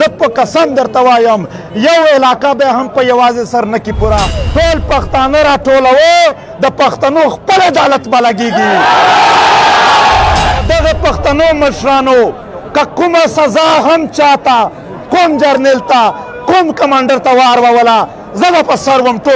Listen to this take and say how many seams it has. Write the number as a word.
two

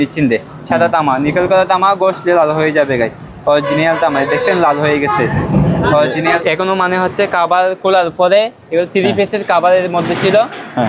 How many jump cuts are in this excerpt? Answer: one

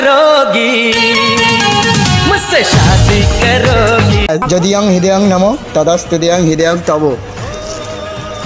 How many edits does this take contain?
one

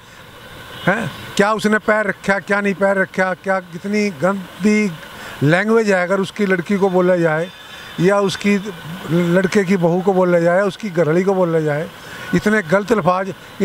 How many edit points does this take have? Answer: zero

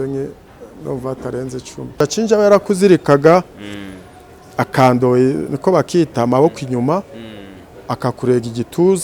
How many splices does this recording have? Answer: one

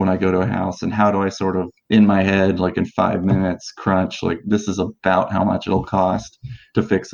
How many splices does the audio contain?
zero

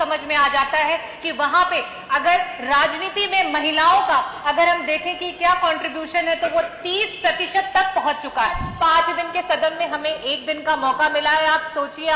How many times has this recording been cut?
one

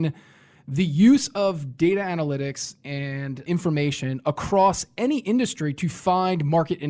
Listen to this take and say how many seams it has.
zero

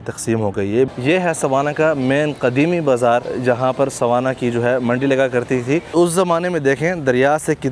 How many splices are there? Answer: three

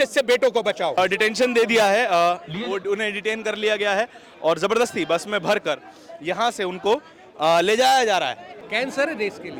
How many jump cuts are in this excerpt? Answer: two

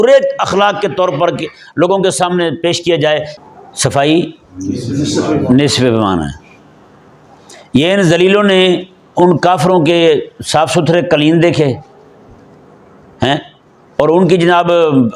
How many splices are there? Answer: one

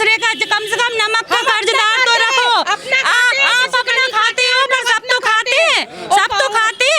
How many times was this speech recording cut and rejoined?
zero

